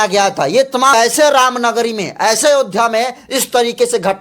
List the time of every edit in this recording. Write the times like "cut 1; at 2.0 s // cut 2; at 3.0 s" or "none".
cut 1; at 0.9 s